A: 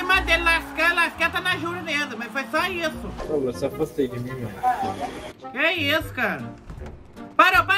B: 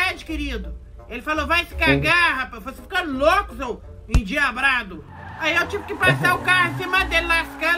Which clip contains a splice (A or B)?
A